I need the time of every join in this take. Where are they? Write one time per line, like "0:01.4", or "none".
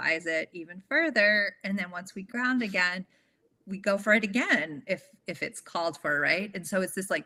none